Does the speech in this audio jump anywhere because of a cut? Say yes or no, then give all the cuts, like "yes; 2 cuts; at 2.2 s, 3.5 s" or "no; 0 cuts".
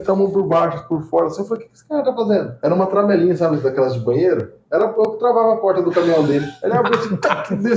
no; 0 cuts